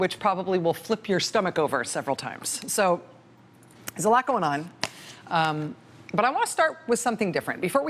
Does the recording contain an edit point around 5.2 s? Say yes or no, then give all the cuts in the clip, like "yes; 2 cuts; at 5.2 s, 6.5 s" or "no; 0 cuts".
no; 1 cut; at 2.4 s